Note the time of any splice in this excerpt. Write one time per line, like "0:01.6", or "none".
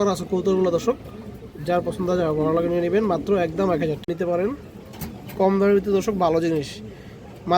0:04.4